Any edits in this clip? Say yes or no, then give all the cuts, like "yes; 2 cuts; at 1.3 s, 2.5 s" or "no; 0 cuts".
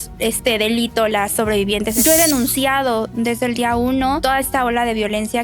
yes; 2 cuts; at 1.9 s, 4.2 s